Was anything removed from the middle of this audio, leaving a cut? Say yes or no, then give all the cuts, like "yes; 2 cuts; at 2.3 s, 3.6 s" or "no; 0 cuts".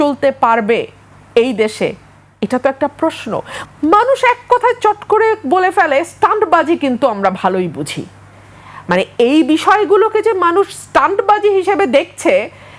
yes; 1 cut; at 3.5 s